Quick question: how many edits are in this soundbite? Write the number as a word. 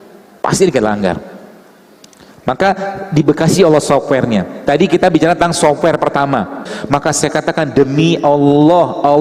one